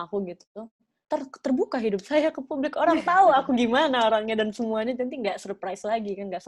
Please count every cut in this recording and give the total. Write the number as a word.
zero